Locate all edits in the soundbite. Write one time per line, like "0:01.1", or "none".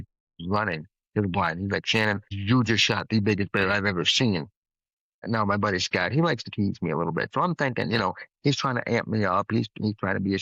none